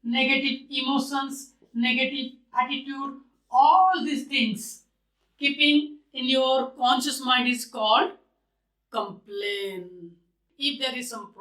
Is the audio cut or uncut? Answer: cut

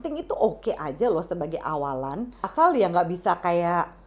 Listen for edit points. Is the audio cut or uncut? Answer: cut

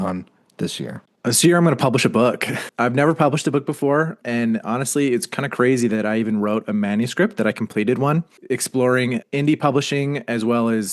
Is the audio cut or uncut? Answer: cut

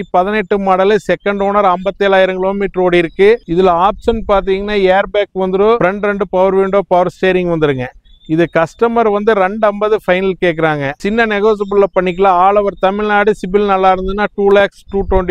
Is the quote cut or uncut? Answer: uncut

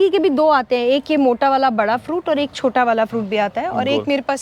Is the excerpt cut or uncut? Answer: uncut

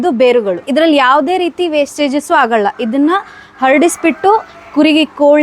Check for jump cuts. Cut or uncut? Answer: uncut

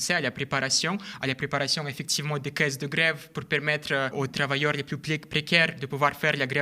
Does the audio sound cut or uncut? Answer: cut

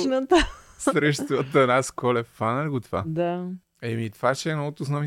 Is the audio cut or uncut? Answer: uncut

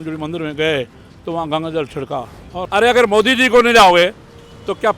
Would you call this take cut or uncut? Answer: cut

